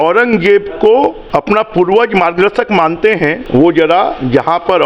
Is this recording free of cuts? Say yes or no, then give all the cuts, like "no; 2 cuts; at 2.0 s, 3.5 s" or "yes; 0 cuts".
no; 2 cuts; at 1.2 s, 3.4 s